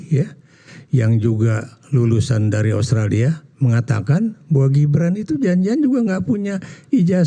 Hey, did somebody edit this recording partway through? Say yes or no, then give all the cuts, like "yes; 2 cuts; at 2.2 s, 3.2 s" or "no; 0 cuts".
no; 0 cuts